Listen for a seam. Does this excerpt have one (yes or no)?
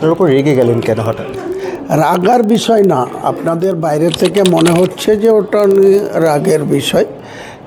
no